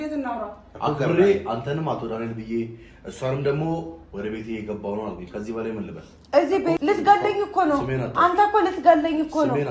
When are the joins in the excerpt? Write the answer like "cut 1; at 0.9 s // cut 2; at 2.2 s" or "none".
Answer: cut 1; at 6.8 s